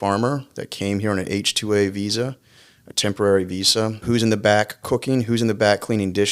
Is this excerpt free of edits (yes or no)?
no